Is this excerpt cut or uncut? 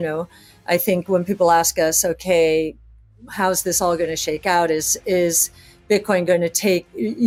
uncut